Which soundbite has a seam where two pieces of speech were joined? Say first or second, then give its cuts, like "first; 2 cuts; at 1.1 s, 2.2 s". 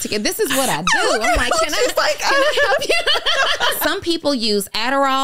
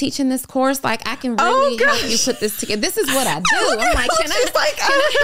first; 1 cut; at 3.8 s